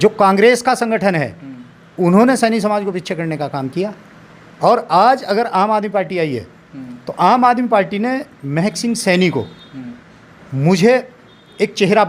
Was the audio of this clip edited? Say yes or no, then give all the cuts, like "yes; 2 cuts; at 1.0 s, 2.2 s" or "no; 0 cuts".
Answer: no; 0 cuts